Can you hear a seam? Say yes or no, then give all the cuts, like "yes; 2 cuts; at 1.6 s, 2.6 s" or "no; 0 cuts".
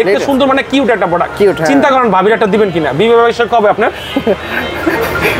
no; 0 cuts